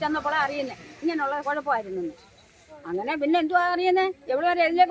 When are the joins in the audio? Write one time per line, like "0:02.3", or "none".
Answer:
none